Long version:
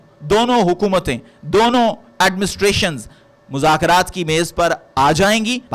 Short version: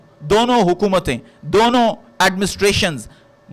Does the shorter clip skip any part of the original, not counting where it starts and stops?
no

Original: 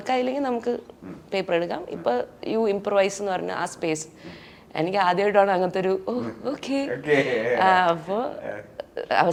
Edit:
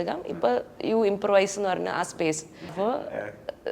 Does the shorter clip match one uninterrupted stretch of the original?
no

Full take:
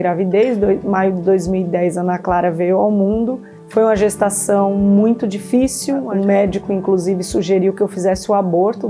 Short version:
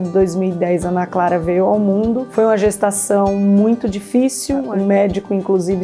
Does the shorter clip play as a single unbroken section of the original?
no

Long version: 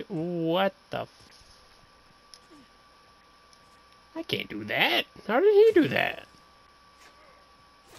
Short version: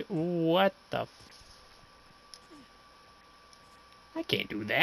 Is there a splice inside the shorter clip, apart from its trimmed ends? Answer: no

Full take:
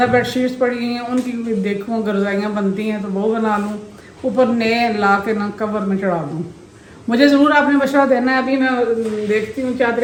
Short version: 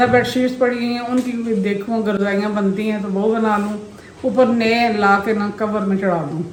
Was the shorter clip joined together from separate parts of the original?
no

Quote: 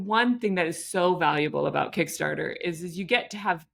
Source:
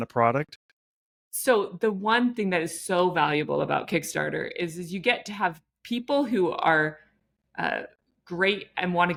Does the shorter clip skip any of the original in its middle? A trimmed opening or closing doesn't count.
no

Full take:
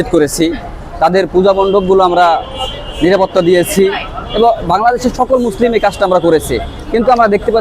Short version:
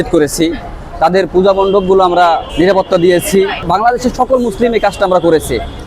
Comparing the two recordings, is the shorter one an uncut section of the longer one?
no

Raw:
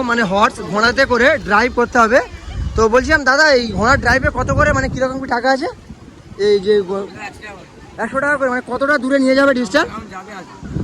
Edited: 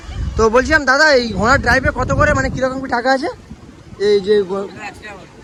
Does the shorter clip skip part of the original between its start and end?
no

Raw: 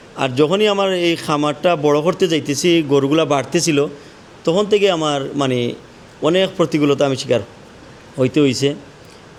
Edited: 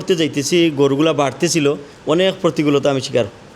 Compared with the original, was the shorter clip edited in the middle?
yes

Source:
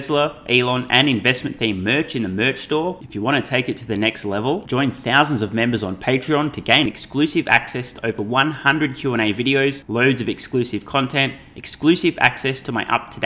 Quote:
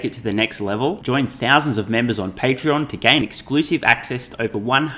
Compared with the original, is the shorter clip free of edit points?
yes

